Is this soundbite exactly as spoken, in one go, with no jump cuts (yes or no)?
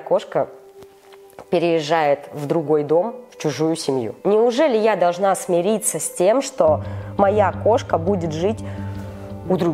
yes